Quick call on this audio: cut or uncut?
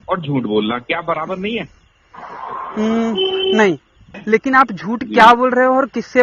cut